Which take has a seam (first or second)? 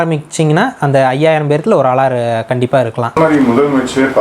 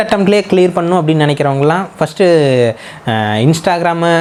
first